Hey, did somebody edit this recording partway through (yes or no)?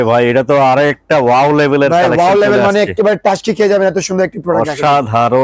no